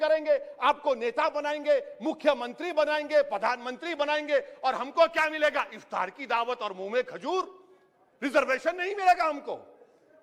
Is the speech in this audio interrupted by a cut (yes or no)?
no